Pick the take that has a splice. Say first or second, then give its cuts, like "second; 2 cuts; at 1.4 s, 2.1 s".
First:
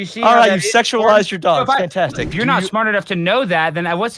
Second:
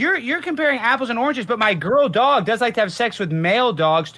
first; 1 cut; at 2.2 s